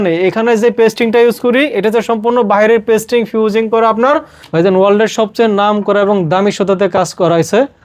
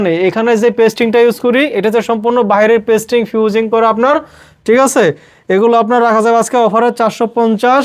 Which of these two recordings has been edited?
first; 1 cut; at 4.4 s

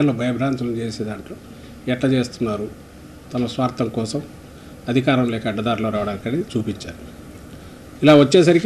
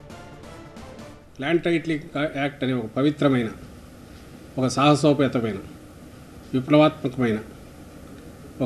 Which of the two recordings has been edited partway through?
second; 1 cut; at 1.3 s

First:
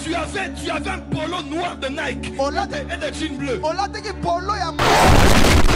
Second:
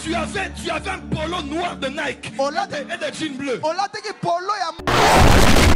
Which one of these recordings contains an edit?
first; 1 cut; at 4.8 s

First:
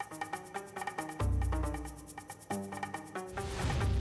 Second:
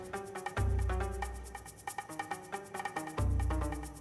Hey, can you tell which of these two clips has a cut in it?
first; 1 cut; at 3.0 s

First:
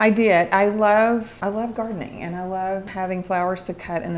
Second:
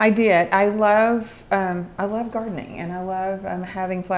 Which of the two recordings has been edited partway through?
first; 2 cuts; at 1.3 s, 2.9 s

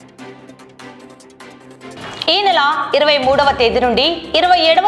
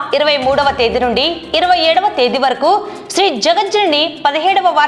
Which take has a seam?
first; 1 cut; at 1.3 s

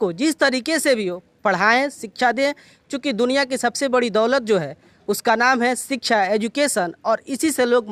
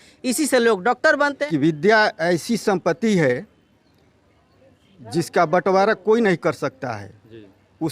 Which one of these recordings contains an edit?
second; 1 cut; at 1.4 s

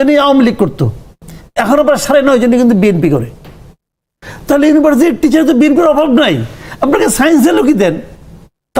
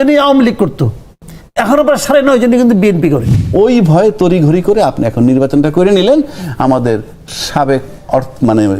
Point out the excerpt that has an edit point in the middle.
second; 1 cut; at 3.4 s

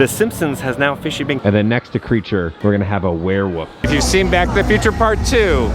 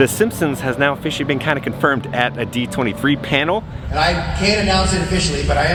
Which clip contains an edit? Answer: first; 2 cuts; at 1.4 s, 3.7 s

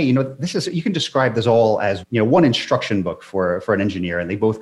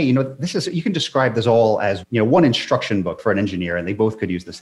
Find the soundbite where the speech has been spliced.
second; 1 cut; at 3.2 s

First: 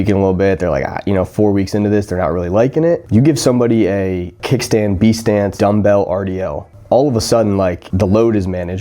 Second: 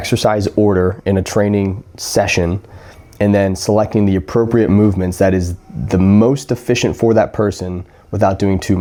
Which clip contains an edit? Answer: first; 4 cuts; at 3.0 s, 4.4 s, 5.5 s, 7.8 s

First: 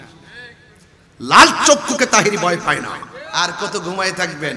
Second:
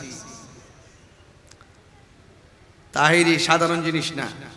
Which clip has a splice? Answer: first; 1 cut; at 3.1 s

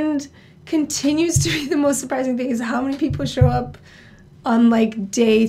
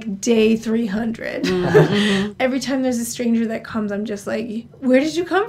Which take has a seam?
second; 1 cut; at 2.3 s

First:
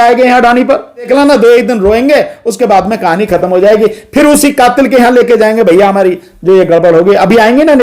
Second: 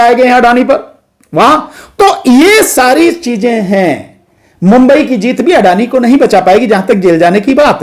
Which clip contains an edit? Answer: first; 1 cut; at 1.1 s

